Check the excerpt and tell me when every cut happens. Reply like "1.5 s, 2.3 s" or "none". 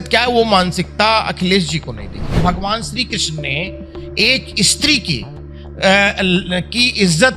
2.3 s